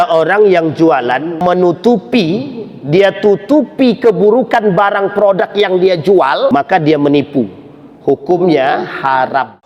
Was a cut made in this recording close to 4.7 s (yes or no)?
no